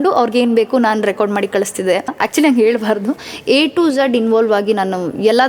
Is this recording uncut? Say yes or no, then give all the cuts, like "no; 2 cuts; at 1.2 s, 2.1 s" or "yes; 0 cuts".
no; 2 cuts; at 2.1 s, 3.3 s